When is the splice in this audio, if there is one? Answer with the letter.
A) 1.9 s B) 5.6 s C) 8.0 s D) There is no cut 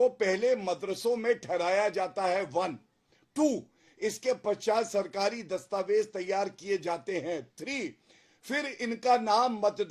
D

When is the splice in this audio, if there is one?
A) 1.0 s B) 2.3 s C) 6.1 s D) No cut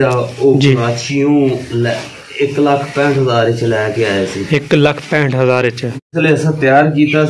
C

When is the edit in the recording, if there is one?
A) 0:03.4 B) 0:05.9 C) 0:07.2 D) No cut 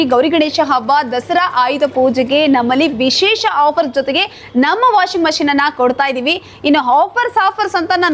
D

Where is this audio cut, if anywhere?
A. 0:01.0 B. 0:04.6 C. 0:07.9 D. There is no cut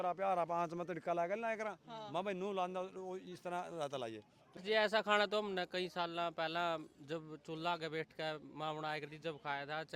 B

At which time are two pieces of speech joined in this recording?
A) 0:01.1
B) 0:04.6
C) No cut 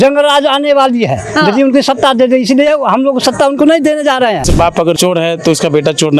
B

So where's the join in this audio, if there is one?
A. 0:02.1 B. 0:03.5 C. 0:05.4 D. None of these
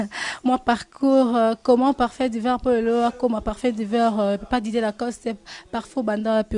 C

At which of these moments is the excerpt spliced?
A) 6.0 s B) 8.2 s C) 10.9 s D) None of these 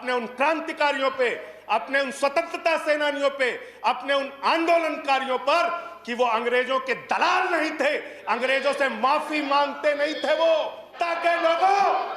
C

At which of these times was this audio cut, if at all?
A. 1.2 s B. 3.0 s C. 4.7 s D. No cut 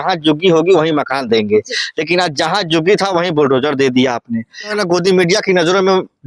C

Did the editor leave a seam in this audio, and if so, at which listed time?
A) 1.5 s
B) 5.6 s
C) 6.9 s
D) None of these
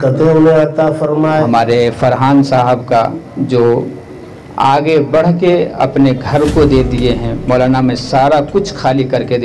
A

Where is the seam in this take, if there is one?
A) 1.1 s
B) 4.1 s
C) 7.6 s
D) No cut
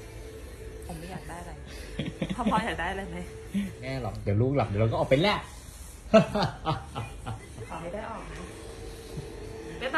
B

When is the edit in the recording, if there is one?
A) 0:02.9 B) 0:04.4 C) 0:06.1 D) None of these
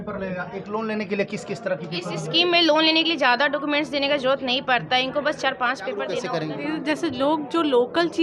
C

